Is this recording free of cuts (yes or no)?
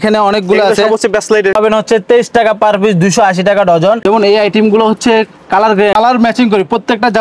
no